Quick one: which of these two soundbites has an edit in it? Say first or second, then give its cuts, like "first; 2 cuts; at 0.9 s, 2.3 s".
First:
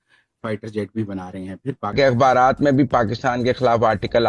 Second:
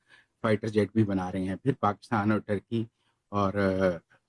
first; 1 cut; at 1.9 s